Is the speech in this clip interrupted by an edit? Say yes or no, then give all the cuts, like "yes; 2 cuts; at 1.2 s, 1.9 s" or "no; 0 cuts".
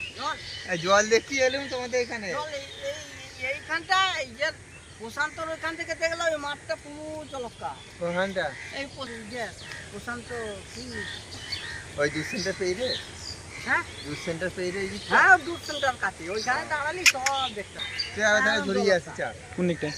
no; 0 cuts